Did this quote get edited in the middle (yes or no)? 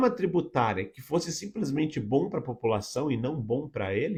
no